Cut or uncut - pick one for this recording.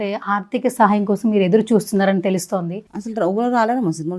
cut